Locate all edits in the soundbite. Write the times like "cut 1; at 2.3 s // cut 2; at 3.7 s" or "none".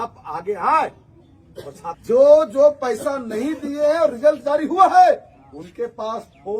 cut 1; at 1.8 s